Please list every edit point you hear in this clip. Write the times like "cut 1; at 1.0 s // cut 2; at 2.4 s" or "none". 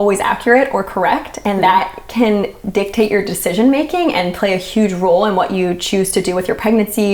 none

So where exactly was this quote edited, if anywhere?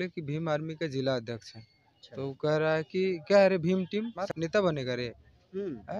cut 1; at 4.2 s

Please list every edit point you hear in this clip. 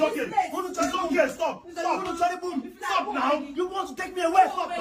none

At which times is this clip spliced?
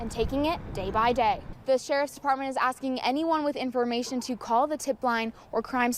cut 1; at 1.5 s

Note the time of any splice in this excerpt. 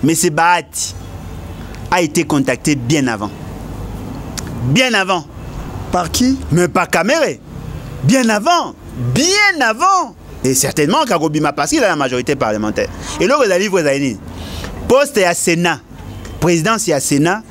cut 1; at 10.3 s

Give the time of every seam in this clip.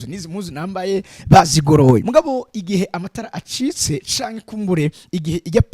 cut 1; at 2.1 s

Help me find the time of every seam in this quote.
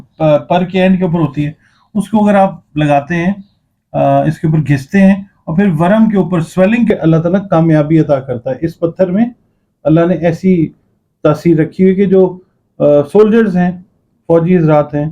cut 1; at 6.9 s

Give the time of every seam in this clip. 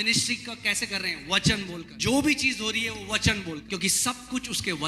cut 1; at 2.0 s // cut 2; at 3.7 s

